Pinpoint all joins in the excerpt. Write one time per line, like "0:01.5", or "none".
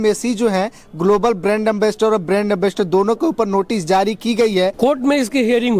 0:04.7